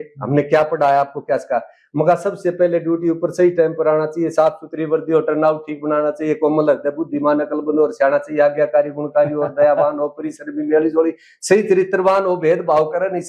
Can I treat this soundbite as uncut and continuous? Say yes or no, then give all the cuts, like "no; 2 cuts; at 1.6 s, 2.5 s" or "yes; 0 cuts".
yes; 0 cuts